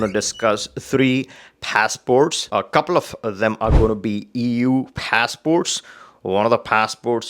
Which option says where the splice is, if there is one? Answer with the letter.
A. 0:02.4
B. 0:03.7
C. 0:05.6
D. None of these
A